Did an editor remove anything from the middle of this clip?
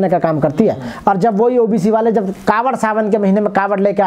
no; 0 cuts

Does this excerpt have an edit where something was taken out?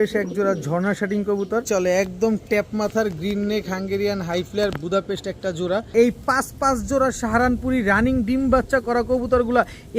yes; 2 cuts; at 1.7 s, 5.9 s

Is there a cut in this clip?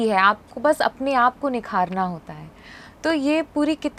no; 0 cuts

